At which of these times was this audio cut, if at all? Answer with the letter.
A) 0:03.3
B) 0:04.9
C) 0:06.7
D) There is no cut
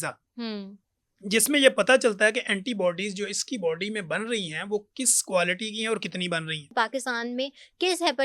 C